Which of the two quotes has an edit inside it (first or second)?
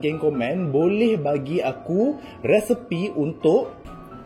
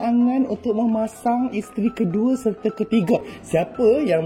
second